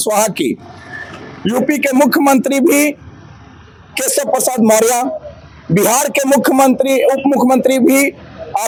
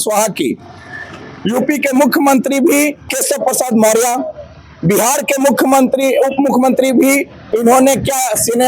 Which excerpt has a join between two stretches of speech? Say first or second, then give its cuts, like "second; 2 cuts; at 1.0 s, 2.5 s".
second; 2 cuts; at 3.1 s, 7.4 s